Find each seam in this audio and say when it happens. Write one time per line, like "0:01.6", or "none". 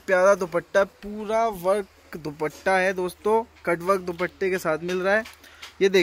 none